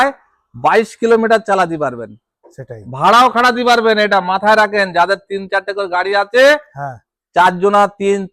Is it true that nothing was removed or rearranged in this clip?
yes; 0 cuts

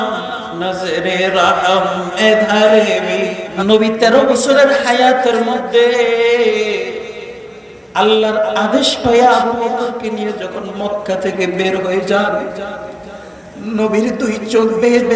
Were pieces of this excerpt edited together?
yes; 1 cut; at 3.5 s

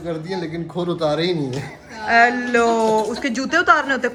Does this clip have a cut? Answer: no; 0 cuts

